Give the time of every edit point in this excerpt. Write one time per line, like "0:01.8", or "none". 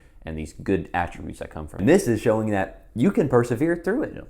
0:01.7